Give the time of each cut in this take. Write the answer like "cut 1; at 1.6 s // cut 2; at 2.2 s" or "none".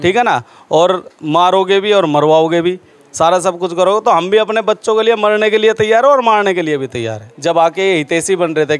cut 1; at 7.2 s